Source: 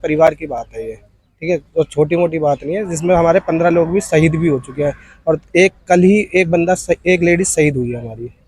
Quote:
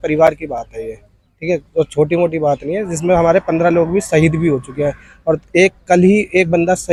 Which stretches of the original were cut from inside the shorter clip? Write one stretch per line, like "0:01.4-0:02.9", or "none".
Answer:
none